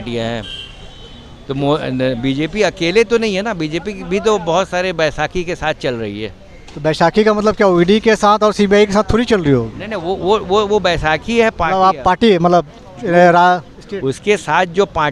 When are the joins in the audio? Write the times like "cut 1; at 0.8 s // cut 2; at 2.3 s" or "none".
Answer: none